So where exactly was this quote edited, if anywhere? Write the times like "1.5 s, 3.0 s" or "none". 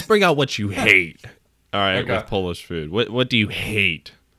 none